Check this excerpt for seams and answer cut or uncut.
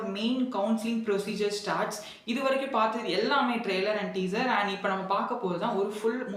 uncut